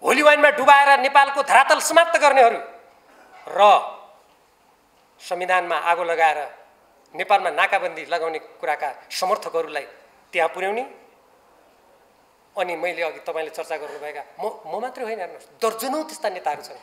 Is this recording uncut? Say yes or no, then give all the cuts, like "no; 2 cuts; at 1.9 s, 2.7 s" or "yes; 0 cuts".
yes; 0 cuts